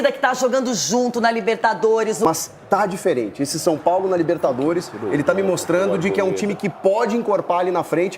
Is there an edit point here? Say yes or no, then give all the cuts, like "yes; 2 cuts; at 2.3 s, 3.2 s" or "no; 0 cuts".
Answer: yes; 1 cut; at 2.2 s